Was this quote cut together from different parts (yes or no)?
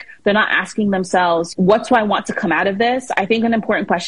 yes